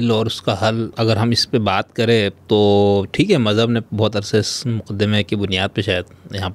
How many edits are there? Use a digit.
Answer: 1